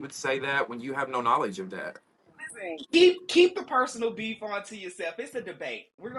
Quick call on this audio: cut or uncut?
uncut